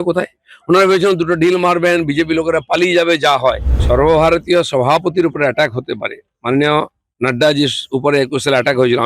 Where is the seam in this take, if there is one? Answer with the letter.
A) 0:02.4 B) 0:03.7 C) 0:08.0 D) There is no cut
B